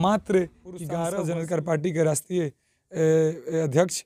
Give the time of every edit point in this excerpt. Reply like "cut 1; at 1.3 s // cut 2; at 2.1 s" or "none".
cut 1; at 1.0 s